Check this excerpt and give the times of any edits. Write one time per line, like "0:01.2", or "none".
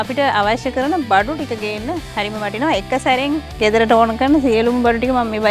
none